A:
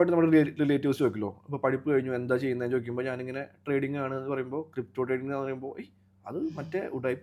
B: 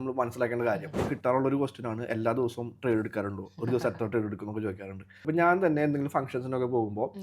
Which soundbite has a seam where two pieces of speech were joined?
B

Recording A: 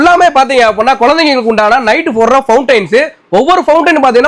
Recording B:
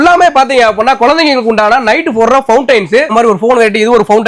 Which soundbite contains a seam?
B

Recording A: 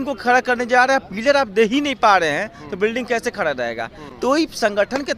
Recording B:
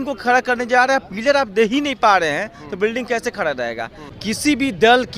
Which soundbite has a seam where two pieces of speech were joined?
B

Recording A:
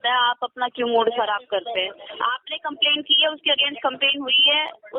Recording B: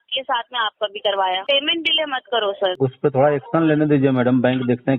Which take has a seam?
B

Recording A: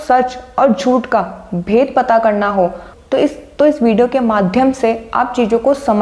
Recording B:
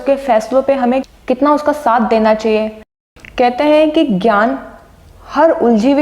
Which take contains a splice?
B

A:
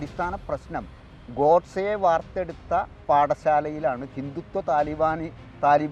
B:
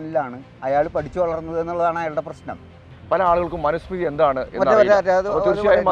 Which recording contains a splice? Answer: B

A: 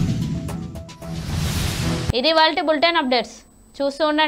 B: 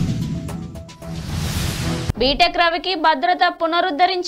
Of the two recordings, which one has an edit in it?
B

